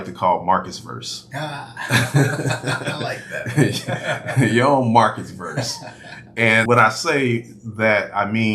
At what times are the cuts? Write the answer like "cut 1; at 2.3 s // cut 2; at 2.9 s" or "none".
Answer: cut 1; at 6.7 s